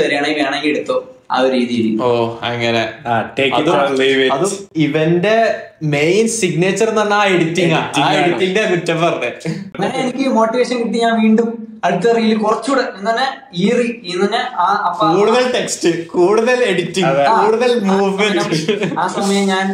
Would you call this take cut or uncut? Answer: cut